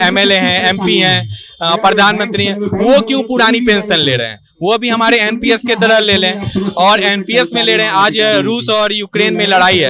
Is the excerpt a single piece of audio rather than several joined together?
yes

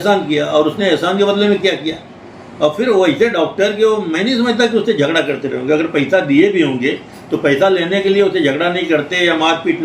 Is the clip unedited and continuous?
yes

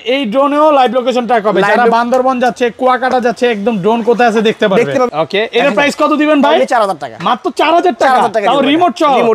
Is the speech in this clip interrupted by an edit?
yes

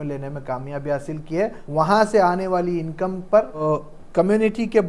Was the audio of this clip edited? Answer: yes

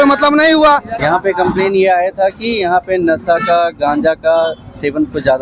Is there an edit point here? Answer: yes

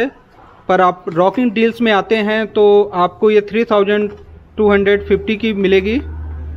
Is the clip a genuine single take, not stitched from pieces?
yes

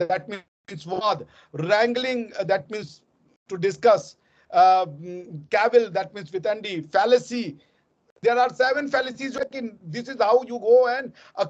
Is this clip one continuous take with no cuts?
no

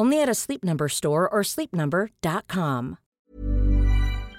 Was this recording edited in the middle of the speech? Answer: yes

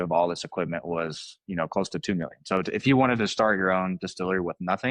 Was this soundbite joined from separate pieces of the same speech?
no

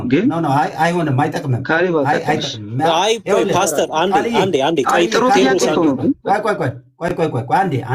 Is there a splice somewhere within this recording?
no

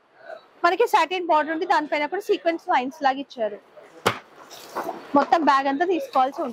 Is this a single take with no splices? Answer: yes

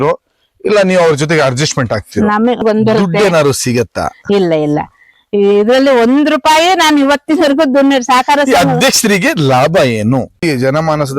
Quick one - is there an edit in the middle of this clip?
yes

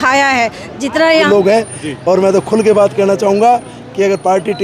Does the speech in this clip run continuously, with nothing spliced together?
no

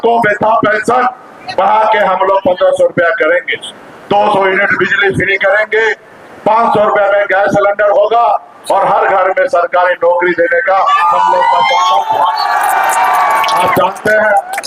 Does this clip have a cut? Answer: no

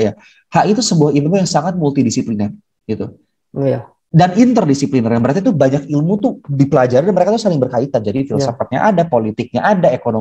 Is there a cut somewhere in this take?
no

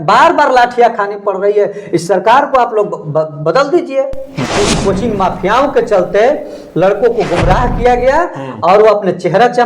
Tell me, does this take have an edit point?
yes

